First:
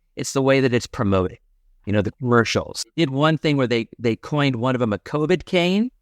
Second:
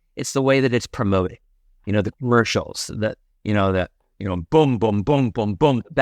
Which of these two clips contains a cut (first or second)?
first